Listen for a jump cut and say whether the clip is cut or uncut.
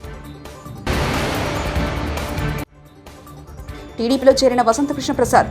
cut